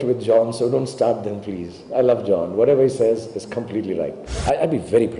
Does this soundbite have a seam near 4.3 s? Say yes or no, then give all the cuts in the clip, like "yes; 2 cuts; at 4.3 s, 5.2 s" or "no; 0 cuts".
yes; 1 cut; at 4.3 s